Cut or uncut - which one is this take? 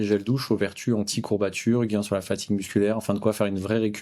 uncut